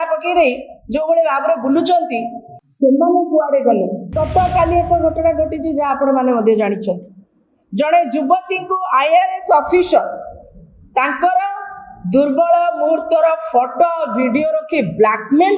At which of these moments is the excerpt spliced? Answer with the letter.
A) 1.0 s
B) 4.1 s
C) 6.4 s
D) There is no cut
B